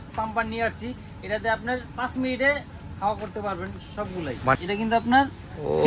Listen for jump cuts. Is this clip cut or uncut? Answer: cut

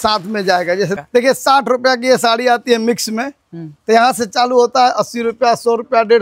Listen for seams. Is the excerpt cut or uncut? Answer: cut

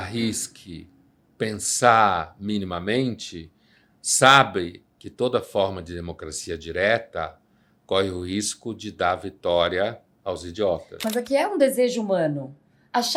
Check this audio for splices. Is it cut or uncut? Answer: cut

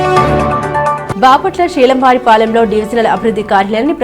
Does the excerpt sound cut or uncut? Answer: uncut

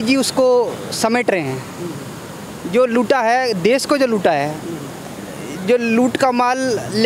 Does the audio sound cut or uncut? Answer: uncut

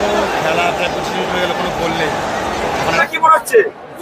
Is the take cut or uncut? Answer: cut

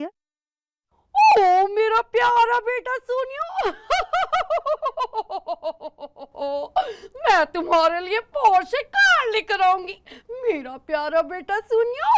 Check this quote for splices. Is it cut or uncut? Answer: uncut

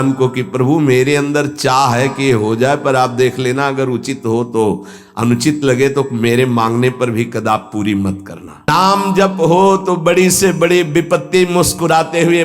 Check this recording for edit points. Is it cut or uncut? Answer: cut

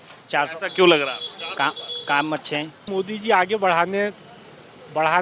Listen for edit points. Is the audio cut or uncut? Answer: cut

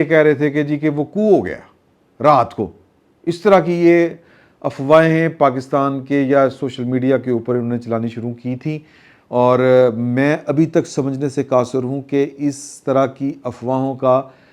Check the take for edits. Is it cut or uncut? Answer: uncut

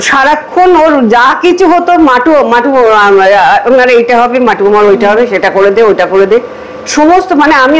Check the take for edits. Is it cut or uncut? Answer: uncut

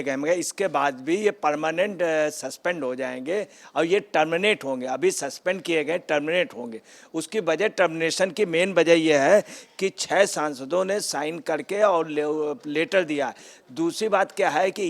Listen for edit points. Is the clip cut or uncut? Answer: uncut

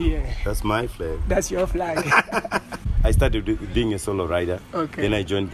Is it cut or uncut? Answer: cut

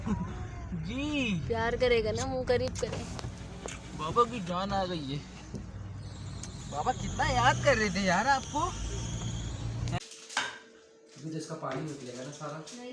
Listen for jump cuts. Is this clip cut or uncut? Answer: cut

